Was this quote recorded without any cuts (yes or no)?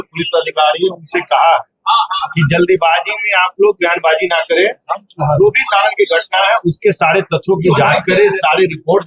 yes